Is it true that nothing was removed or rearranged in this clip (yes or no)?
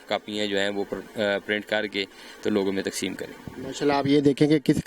yes